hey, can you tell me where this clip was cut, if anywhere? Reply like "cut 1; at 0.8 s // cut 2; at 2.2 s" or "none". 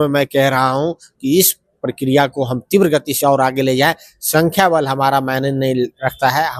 none

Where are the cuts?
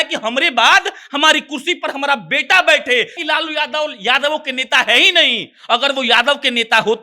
cut 1; at 3.2 s

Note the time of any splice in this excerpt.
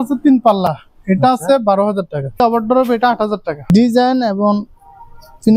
cut 1; at 2.4 s // cut 2; at 3.7 s

